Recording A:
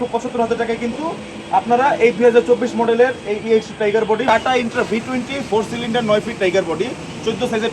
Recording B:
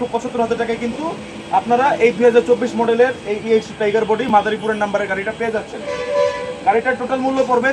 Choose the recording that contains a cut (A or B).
A